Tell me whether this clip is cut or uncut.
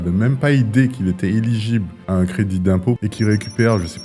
cut